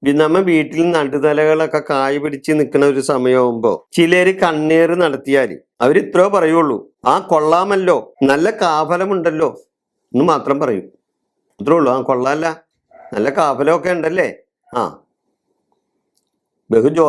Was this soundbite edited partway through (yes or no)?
no